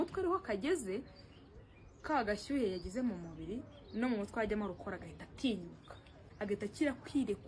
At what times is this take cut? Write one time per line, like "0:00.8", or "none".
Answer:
0:06.3